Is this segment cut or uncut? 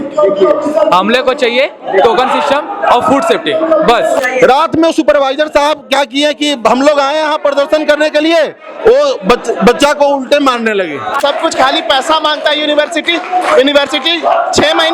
cut